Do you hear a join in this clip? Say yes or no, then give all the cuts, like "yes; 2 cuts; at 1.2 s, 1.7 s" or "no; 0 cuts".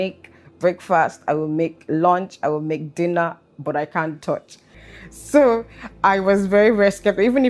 yes; 1 cut; at 4.8 s